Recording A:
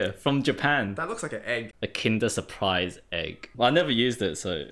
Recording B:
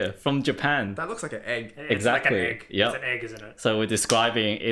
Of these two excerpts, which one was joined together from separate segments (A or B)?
A